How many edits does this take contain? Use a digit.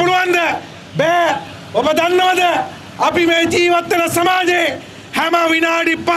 0